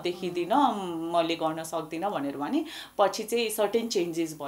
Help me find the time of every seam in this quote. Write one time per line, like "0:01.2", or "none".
none